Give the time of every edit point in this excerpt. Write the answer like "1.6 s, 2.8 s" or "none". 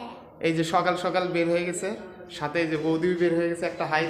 none